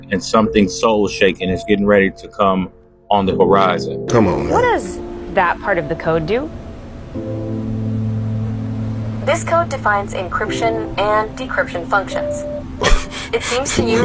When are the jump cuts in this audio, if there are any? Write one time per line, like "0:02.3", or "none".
0:04.1